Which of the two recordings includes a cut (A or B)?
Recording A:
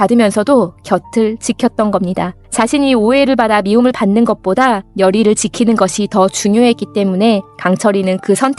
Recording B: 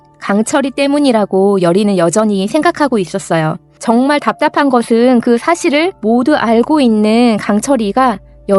A